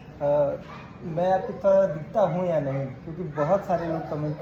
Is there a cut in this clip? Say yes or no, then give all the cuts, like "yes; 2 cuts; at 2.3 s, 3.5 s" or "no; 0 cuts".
no; 0 cuts